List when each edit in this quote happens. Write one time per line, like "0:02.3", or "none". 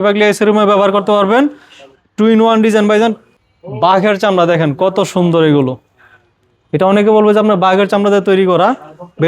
0:03.3